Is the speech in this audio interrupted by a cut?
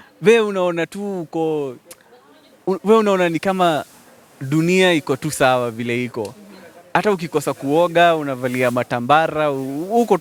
no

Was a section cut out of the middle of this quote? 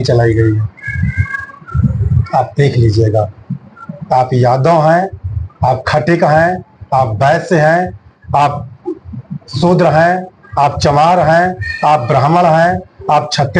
no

